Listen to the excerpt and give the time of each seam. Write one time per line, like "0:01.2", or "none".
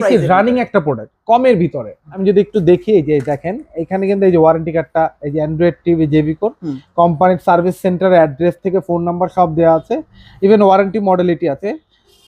0:02.1